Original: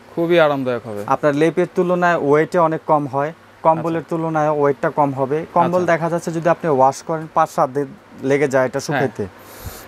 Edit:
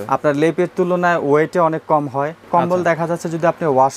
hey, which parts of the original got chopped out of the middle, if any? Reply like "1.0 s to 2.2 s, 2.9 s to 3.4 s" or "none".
3.4 s to 5.5 s